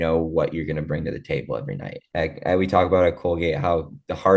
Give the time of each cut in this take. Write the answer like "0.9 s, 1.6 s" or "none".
2.1 s